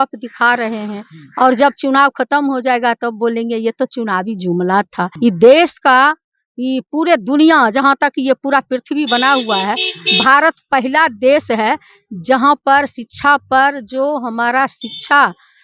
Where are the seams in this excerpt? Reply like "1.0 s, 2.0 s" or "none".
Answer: 5.0 s